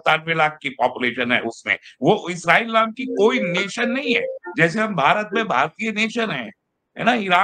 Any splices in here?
no; 0 cuts

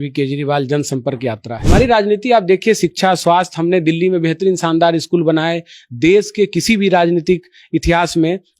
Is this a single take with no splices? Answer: no; 1 cut; at 1.5 s

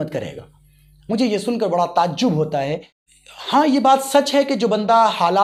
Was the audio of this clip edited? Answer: yes; 1 cut; at 3.0 s

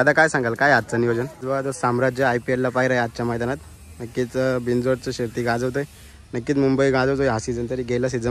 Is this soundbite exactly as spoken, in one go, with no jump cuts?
no; 1 cut; at 1.4 s

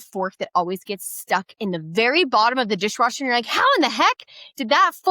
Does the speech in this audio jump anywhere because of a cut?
no; 0 cuts

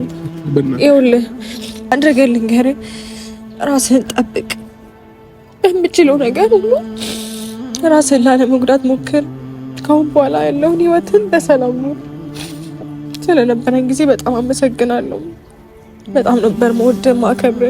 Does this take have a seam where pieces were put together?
yes; 2 cuts; at 12.0 s, 13.3 s

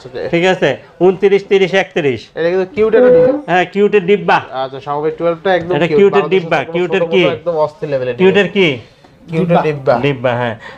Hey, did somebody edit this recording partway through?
no; 0 cuts

